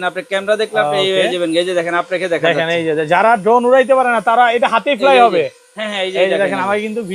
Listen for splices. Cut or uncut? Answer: uncut